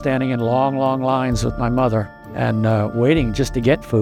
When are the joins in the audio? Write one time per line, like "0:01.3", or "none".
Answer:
none